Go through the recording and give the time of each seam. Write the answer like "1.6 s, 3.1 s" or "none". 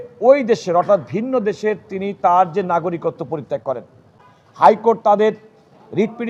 none